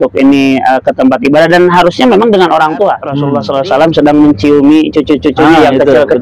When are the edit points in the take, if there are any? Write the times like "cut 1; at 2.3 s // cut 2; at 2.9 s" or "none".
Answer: cut 1; at 3.1 s